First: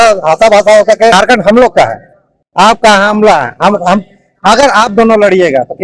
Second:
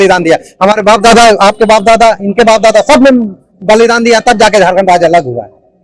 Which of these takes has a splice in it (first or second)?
first